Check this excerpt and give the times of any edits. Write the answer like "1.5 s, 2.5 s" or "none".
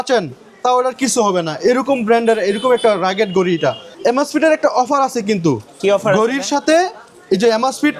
3.9 s